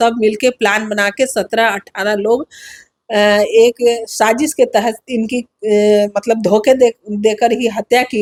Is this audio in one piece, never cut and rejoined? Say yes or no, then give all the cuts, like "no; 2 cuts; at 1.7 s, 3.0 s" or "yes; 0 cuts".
yes; 0 cuts